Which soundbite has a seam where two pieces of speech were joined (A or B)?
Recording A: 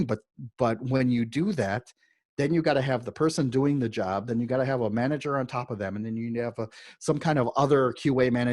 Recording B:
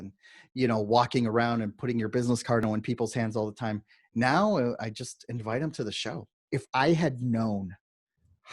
B